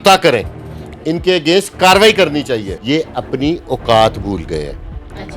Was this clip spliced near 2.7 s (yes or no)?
yes